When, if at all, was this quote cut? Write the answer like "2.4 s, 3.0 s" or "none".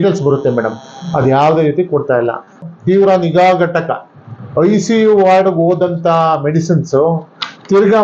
2.6 s